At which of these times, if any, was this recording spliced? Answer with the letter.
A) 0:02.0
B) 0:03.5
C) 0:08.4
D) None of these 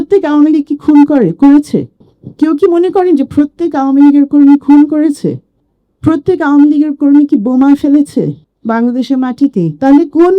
A